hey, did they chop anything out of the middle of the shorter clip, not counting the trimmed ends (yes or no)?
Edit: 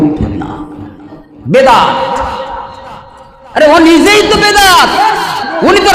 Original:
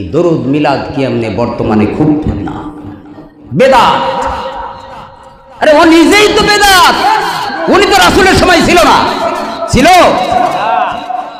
no